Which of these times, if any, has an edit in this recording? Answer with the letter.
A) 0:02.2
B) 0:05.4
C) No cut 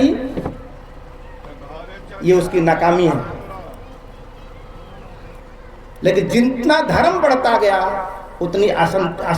B